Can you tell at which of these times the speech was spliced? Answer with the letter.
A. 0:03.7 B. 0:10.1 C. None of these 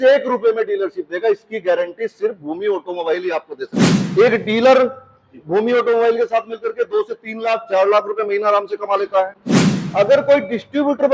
A